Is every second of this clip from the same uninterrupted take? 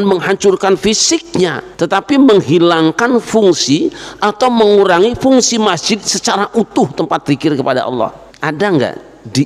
no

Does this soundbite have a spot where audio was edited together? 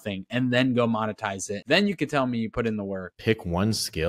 yes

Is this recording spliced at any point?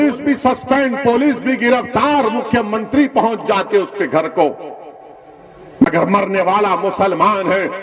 no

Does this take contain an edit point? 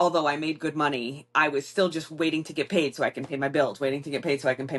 no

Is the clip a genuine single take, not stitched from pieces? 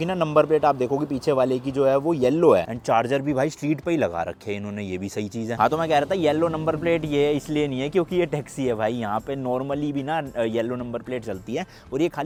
yes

